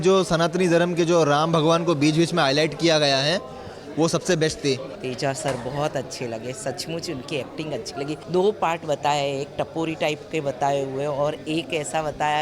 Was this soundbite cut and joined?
yes; 2 cuts; at 4.9 s, 8.2 s

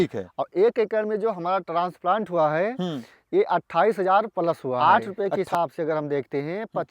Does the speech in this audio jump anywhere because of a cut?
yes; 1 cut; at 4.8 s

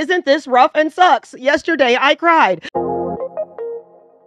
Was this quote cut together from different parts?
yes; 1 cut; at 2.6 s

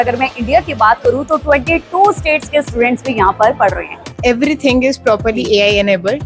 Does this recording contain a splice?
yes; 1 cut; at 4.0 s

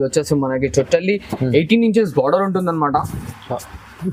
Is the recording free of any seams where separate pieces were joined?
yes; 0 cuts

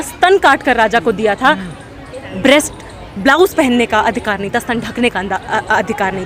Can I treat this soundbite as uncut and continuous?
yes; 0 cuts

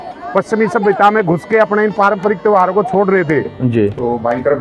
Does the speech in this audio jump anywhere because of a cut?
yes; 1 cut; at 3.5 s

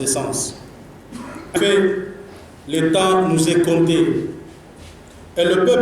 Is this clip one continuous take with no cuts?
no; 1 cut; at 1.6 s

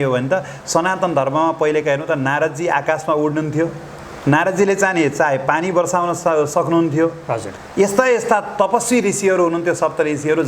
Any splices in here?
no; 0 cuts

